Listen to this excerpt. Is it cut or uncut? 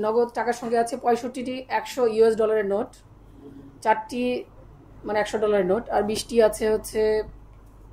uncut